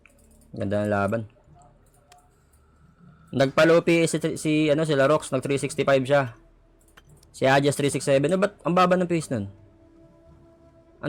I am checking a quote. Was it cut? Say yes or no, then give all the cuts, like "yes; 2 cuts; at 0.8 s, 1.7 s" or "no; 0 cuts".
no; 0 cuts